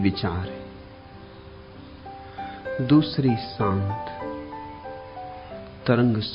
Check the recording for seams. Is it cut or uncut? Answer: cut